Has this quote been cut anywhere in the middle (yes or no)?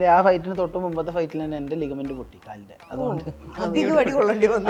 no